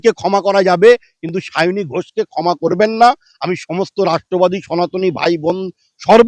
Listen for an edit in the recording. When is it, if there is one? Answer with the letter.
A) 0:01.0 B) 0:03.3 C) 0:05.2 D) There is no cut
D